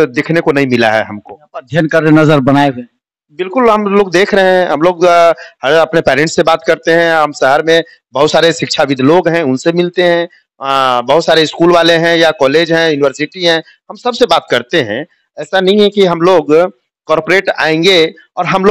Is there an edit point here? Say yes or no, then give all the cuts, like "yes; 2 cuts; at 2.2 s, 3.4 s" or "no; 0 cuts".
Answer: no; 0 cuts